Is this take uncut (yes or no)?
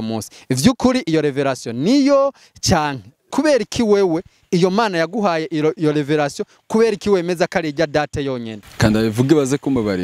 no